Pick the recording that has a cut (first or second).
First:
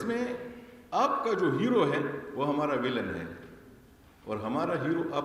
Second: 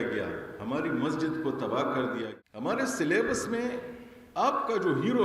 second